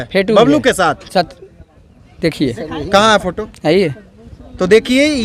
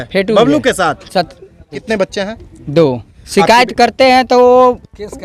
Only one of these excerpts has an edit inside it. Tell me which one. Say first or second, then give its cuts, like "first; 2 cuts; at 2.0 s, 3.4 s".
second; 2 cuts; at 1.8 s, 3.2 s